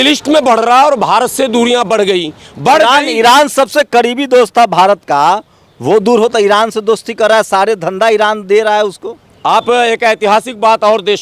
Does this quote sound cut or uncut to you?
uncut